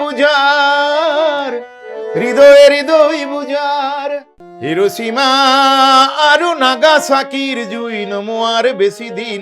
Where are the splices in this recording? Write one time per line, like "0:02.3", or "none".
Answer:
0:04.3